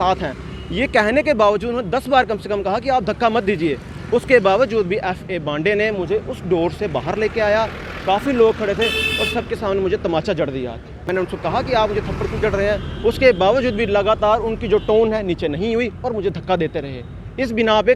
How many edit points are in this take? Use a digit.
1